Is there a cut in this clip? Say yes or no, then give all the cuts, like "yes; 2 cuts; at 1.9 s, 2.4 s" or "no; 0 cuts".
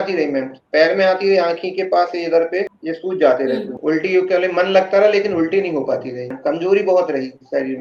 yes; 2 cuts; at 3.7 s, 6.4 s